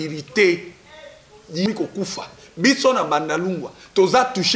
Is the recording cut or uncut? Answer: cut